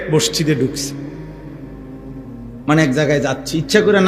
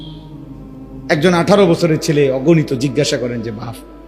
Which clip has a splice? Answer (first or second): second